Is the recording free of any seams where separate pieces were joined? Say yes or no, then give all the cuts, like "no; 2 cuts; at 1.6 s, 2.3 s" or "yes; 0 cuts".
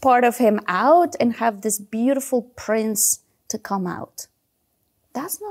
yes; 0 cuts